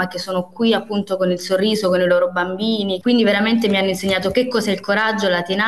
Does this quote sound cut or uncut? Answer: cut